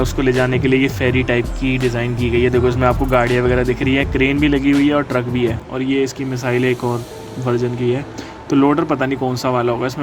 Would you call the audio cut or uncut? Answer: cut